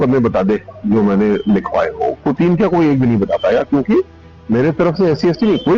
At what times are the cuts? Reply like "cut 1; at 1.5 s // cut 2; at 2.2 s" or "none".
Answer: none